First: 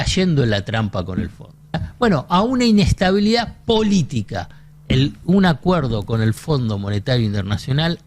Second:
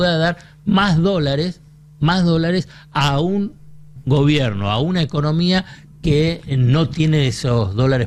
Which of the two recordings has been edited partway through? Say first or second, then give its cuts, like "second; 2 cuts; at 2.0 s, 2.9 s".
first; 1 cut; at 1.9 s